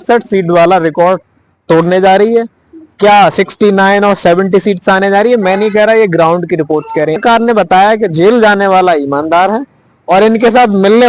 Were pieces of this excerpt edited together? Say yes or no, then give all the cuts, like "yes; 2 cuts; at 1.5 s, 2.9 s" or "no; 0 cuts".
yes; 1 cut; at 7.2 s